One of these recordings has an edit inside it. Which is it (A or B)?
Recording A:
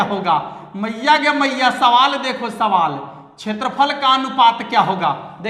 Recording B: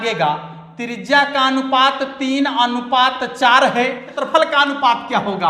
B